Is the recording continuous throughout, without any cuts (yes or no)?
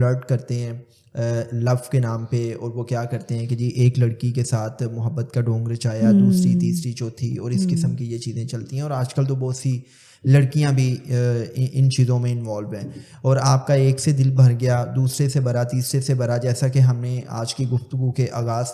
yes